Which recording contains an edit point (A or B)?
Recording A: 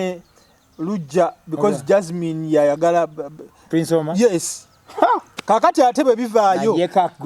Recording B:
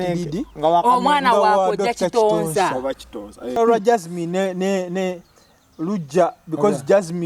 B